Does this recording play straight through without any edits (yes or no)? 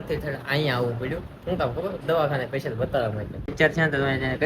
no